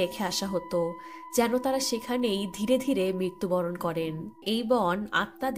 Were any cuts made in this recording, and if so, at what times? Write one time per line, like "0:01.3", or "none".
0:04.4